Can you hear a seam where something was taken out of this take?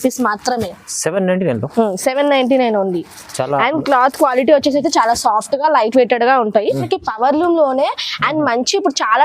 yes; 1 cut; at 6.8 s

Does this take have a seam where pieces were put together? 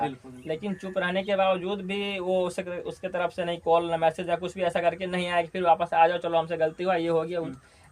no; 0 cuts

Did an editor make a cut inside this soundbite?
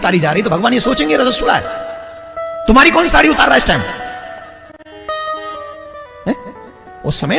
no; 0 cuts

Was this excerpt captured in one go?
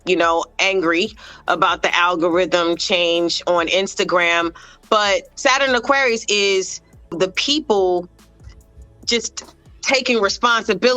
no; 2 cuts; at 5.3 s, 7.1 s

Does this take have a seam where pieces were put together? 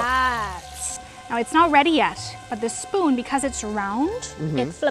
yes; 1 cut; at 1.0 s

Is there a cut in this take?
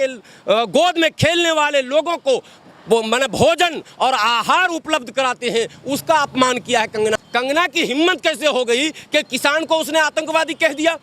yes; 1 cut; at 7.1 s

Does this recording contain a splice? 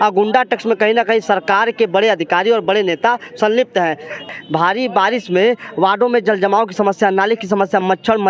yes; 1 cut; at 4.3 s

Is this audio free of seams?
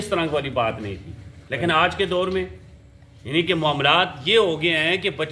yes; 0 cuts

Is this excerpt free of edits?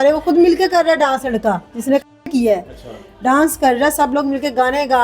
yes; 0 cuts

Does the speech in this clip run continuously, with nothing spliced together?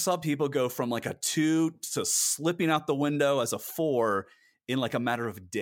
yes; 0 cuts

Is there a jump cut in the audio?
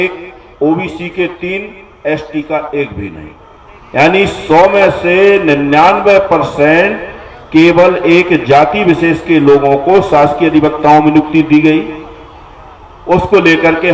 no; 0 cuts

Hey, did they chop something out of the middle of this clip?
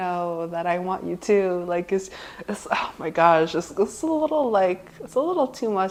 no; 0 cuts

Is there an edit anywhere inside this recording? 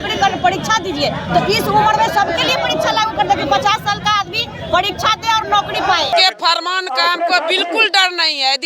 yes; 1 cut; at 6.1 s

